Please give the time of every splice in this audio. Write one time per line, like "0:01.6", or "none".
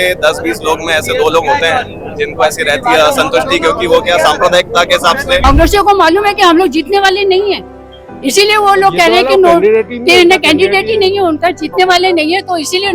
0:05.4